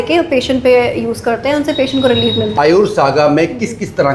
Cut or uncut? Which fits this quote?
cut